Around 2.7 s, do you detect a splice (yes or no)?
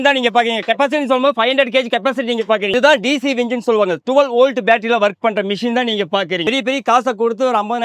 yes